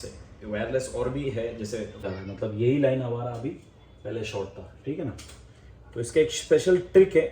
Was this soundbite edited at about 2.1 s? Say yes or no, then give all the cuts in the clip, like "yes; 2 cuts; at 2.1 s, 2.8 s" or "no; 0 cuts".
yes; 1 cut; at 2.1 s